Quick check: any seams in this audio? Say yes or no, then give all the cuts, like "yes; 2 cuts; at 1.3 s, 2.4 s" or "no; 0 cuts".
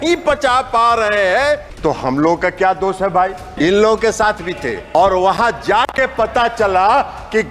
yes; 3 cuts; at 1.7 s, 3.4 s, 4.8 s